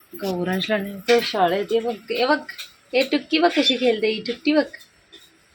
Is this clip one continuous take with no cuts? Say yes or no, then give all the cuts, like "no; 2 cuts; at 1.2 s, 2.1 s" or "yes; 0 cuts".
yes; 0 cuts